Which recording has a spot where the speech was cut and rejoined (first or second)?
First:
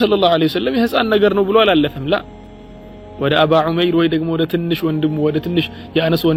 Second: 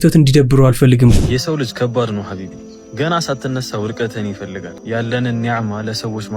second